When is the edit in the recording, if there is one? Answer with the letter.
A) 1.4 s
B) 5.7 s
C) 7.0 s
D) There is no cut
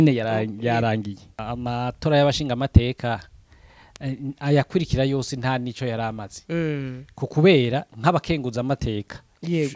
A